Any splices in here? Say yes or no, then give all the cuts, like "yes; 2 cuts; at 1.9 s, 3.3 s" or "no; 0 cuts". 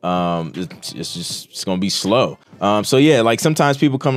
yes; 1 cut; at 2.4 s